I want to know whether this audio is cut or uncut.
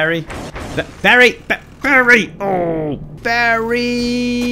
cut